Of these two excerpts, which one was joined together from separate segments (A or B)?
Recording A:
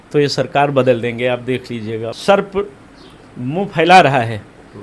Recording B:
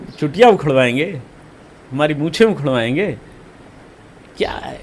A